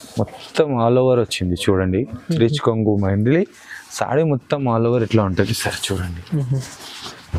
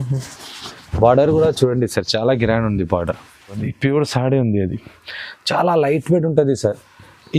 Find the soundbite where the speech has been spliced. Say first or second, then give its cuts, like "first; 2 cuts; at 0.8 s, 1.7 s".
second; 1 cut; at 3.7 s